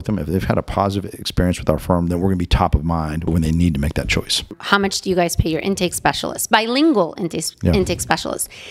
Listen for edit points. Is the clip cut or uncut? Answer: cut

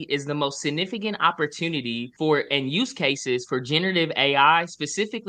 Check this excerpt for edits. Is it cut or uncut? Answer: uncut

